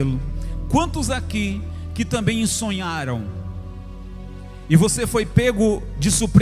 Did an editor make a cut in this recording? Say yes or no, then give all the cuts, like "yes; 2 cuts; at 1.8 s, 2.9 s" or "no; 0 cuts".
no; 0 cuts